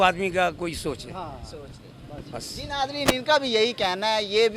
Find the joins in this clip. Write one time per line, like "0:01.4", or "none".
none